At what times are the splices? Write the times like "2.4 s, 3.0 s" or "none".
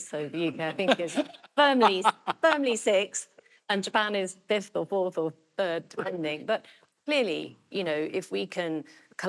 none